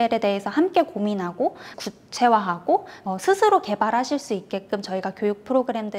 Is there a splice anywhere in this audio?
yes; 2 cuts; at 1.7 s, 2.9 s

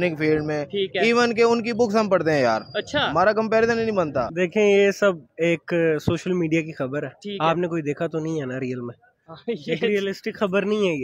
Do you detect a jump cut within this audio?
yes; 1 cut; at 4.3 s

